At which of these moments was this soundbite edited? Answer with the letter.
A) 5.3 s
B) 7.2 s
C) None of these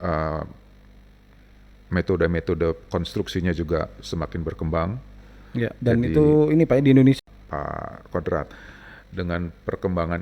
B